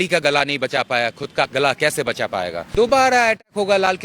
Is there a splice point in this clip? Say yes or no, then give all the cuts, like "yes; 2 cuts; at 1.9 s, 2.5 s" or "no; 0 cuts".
yes; 1 cut; at 2.6 s